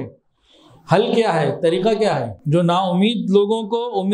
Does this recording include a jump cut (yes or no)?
yes